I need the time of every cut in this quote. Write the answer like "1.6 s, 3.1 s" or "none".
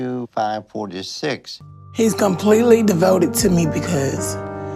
1.7 s